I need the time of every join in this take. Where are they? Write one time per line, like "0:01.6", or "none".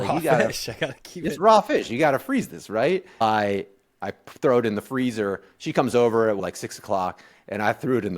0:03.2
0:06.4